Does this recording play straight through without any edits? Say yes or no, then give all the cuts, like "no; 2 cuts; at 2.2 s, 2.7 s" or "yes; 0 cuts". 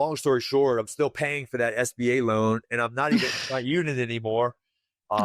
yes; 0 cuts